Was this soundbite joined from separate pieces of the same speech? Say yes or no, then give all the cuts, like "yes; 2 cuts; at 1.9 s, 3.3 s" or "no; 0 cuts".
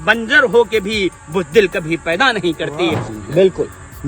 yes; 1 cut; at 3.1 s